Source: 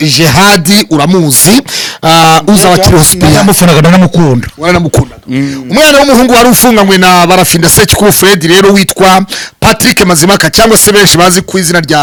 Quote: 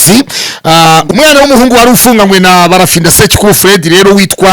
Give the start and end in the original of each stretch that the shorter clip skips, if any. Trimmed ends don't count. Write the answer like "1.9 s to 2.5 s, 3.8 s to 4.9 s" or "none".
2.4 s to 5.6 s